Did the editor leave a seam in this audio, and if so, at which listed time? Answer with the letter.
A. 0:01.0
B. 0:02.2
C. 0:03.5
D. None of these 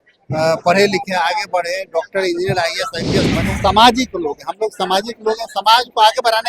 C